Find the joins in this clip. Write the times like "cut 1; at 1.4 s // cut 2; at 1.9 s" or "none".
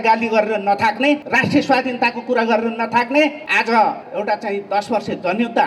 cut 1; at 1.2 s // cut 2; at 3.4 s // cut 3; at 4.0 s